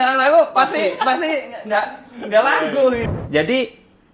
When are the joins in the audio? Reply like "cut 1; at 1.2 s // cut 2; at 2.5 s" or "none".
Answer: cut 1; at 3.0 s